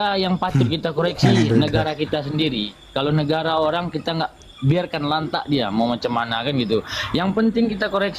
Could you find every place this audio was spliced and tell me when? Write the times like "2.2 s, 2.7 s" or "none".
none